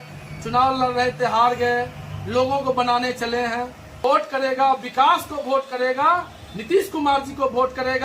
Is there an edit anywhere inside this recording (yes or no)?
yes